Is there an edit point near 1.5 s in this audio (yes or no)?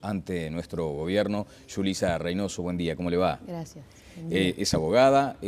no